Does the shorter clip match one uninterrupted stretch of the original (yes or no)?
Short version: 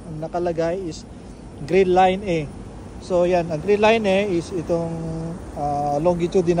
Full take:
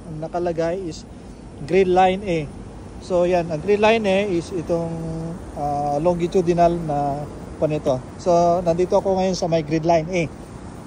yes